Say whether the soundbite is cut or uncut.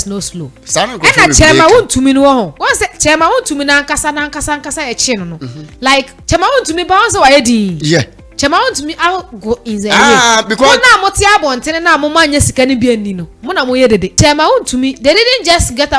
cut